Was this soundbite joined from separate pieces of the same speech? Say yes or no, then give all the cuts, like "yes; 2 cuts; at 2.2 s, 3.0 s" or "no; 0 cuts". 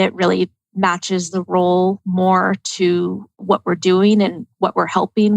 yes; 1 cut; at 3.4 s